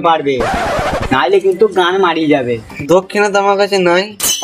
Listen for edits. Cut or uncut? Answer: cut